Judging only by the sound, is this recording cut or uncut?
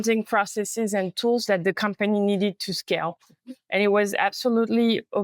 uncut